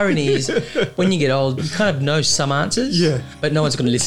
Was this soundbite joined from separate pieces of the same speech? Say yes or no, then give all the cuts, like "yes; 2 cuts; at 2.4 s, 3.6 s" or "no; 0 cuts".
no; 0 cuts